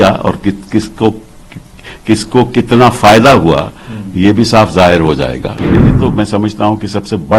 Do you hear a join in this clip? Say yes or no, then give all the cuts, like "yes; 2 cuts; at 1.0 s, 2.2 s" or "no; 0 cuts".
yes; 1 cut; at 5.6 s